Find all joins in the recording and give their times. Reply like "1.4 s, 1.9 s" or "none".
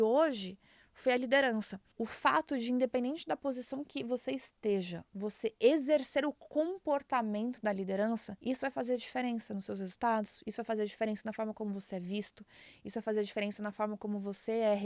1.8 s, 8.3 s

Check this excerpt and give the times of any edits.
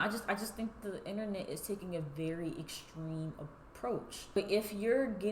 4.4 s

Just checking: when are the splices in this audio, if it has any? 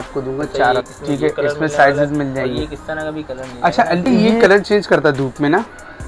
0.8 s, 4.1 s

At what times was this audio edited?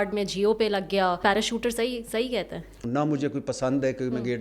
1.2 s, 2.8 s

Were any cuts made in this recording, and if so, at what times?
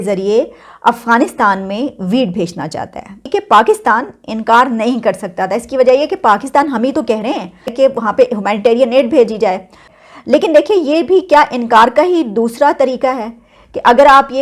3.2 s

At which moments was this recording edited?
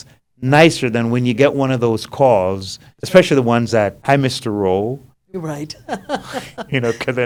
none

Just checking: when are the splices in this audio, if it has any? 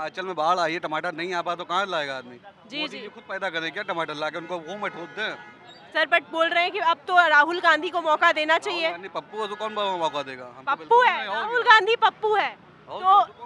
none

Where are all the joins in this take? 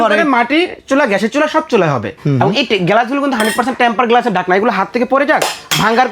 2.1 s

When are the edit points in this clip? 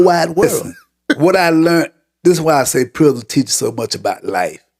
1.2 s

